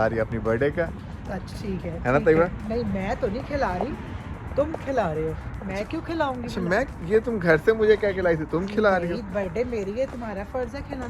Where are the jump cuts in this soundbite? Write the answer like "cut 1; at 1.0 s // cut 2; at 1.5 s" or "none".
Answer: none